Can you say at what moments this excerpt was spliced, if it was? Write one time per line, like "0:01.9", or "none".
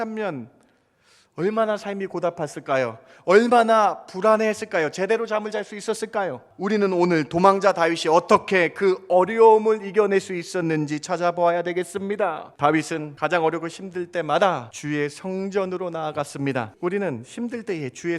0:06.5
0:12.5
0:13.1
0:14.7
0:16.7